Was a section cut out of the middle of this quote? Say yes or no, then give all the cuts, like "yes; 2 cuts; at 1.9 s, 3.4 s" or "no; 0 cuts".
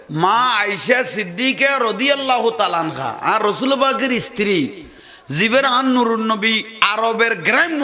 no; 0 cuts